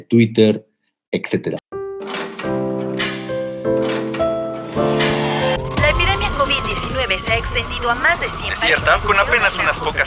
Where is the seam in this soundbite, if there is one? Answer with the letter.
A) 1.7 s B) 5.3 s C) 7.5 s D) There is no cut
A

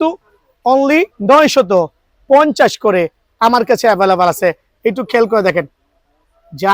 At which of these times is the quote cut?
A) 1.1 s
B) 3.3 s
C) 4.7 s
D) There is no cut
A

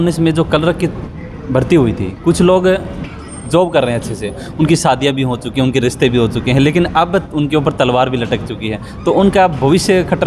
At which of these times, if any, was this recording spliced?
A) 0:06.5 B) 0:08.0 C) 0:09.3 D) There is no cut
D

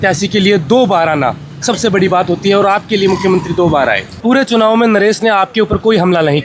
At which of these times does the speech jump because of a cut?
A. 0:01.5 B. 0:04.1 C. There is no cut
B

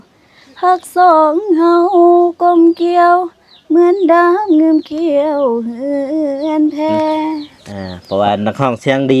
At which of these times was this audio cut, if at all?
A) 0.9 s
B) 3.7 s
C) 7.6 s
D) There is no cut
C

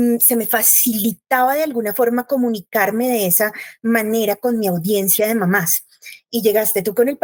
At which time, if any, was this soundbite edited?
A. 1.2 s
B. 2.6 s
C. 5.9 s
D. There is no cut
D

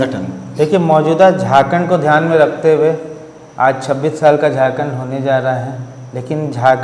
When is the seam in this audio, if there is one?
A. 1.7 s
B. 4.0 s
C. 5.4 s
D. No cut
D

